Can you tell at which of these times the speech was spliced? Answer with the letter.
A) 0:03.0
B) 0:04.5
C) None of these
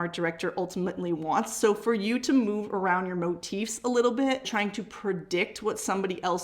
B